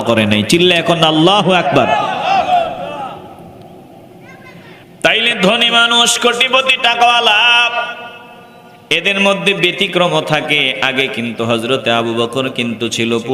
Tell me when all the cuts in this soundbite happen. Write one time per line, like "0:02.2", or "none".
none